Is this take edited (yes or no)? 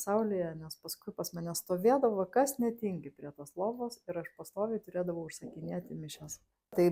no